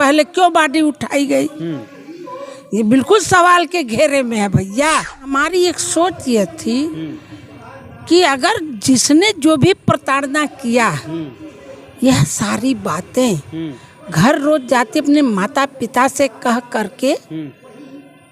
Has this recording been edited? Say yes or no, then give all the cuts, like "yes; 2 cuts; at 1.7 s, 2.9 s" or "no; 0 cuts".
yes; 1 cut; at 5.4 s